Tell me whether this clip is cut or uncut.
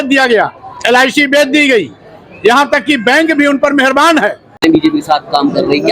cut